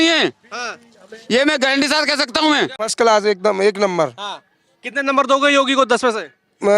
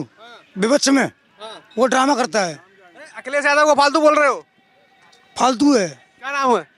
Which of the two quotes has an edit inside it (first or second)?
first